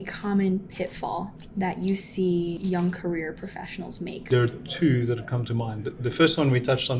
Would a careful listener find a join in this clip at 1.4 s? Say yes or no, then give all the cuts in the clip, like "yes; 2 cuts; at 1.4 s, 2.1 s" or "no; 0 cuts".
yes; 3 cuts; at 1.4 s, 2.6 s, 4.2 s